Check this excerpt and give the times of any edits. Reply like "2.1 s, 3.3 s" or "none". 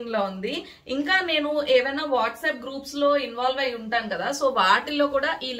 none